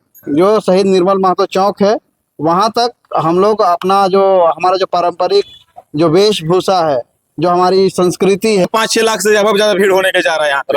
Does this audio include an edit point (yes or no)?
yes